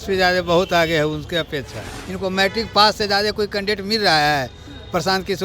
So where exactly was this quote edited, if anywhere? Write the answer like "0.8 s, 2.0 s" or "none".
2.0 s